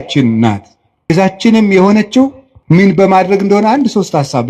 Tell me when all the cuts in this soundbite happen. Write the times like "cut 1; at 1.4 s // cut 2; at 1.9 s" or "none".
cut 1; at 1.1 s // cut 2; at 2.8 s